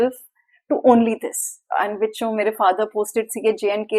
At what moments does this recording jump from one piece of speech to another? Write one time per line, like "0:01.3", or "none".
0:01.6